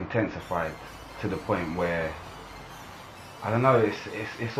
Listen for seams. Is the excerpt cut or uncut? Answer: uncut